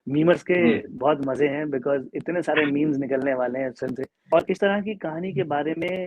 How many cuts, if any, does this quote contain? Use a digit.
1